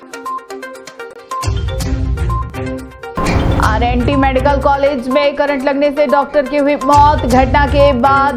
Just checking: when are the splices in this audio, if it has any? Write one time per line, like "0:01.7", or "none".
none